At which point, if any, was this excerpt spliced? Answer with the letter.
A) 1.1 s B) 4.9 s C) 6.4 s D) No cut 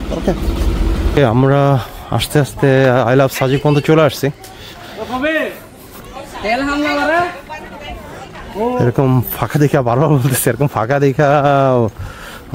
A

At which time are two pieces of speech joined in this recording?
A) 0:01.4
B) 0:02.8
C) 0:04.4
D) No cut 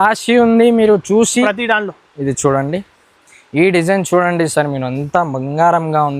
A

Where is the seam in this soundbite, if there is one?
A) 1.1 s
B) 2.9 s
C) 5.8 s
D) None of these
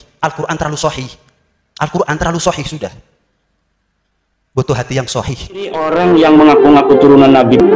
C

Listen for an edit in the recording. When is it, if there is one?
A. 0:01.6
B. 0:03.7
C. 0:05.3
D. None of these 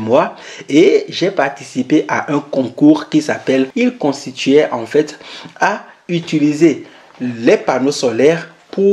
B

